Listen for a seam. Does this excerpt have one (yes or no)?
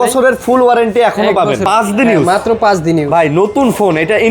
yes